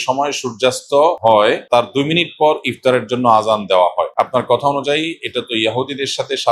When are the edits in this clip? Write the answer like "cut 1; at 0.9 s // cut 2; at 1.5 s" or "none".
cut 1; at 1.3 s // cut 2; at 4.1 s

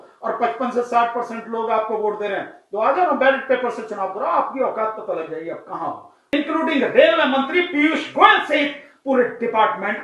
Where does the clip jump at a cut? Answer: cut 1; at 6.3 s

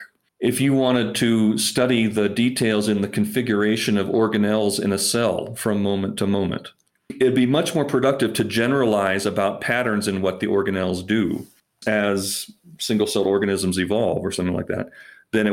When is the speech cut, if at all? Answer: none

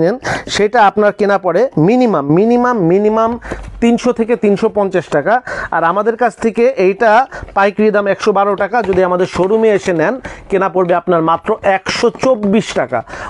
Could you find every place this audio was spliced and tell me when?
none

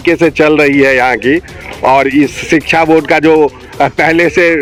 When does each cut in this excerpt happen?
none

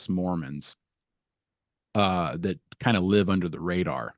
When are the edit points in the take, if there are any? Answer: none

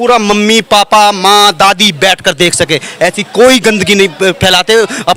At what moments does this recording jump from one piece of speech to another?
none

